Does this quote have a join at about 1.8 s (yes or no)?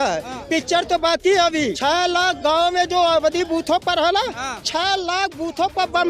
yes